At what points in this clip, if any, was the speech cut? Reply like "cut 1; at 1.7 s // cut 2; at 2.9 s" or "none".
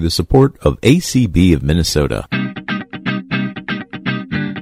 cut 1; at 2.2 s